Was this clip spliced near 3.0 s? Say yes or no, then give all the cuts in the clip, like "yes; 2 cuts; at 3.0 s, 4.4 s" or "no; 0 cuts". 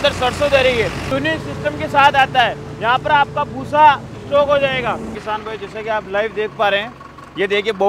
no; 2 cuts; at 1.1 s, 5.2 s